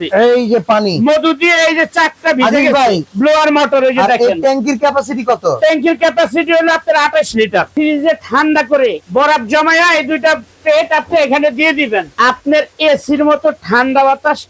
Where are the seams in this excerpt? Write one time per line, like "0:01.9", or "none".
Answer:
0:03.1
0:07.7
0:09.0
0:12.1